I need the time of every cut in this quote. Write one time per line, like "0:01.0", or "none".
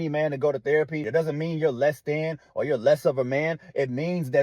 0:01.0